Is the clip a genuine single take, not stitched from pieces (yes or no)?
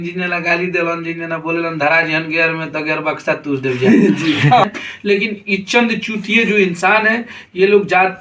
no